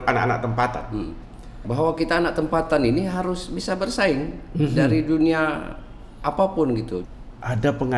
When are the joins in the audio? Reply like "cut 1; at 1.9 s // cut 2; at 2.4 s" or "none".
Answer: cut 1; at 1.6 s // cut 2; at 7.0 s

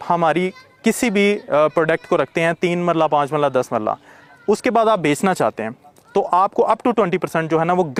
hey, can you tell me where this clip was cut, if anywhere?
none

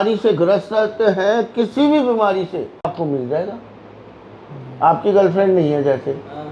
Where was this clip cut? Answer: cut 1; at 2.9 s

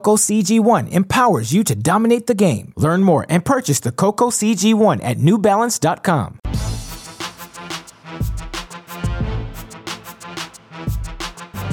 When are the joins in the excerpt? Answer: cut 1; at 6.4 s // cut 2; at 10.3 s

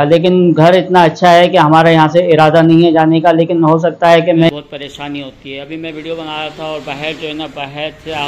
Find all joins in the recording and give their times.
cut 1; at 4.5 s

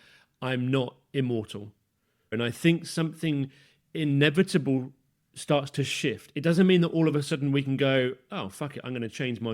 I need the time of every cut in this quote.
cut 1; at 2.3 s

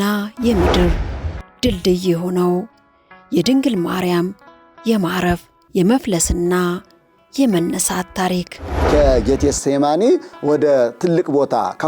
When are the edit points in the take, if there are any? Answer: cut 1; at 8.7 s

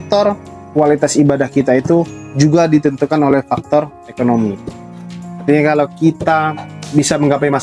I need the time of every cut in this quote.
none

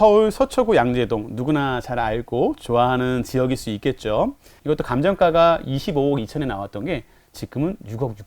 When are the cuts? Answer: cut 1; at 4.5 s

